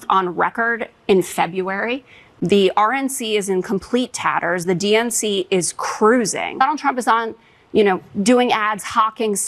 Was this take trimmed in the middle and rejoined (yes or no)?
yes